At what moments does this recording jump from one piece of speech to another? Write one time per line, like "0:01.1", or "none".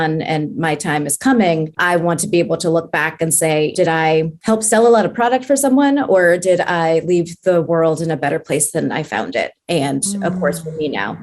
0:01.8
0:04.0

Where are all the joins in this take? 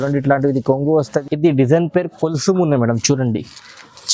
0:01.1

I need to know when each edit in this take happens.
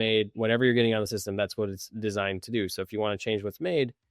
none

